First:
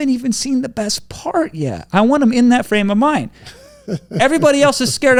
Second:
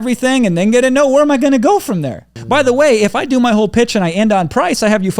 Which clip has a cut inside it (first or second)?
second